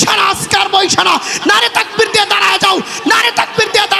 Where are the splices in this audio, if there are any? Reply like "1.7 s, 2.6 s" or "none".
none